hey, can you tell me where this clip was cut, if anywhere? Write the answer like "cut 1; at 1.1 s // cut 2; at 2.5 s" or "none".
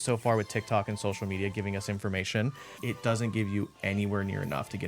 cut 1; at 2.8 s